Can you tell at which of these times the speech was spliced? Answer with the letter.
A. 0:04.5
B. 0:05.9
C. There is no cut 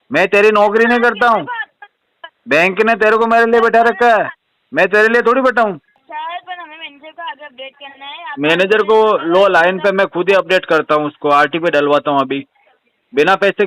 B